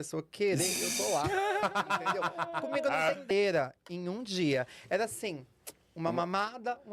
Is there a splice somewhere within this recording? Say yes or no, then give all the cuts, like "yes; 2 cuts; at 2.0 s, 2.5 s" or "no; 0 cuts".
yes; 1 cut; at 3.3 s